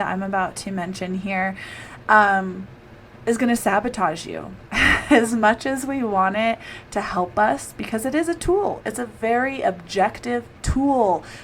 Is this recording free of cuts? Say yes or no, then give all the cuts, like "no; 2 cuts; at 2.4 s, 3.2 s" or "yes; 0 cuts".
yes; 0 cuts